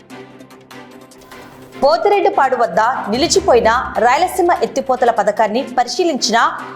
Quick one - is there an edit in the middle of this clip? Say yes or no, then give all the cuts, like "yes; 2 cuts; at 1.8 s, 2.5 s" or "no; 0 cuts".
yes; 1 cut; at 1.1 s